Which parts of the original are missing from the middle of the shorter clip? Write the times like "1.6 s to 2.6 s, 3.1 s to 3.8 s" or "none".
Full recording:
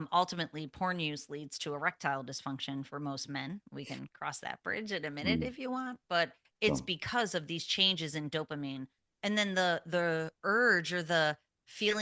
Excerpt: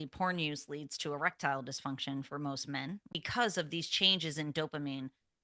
3.8 s to 6.9 s